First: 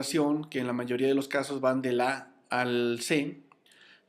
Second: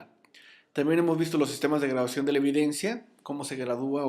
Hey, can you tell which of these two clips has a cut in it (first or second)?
second